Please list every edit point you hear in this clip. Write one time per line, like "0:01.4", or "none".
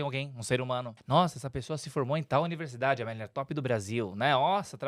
0:00.9